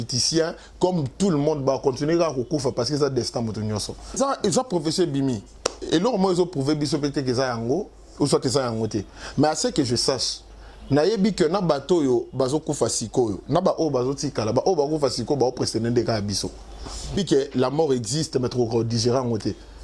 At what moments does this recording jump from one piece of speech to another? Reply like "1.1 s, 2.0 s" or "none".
4.2 s, 17.2 s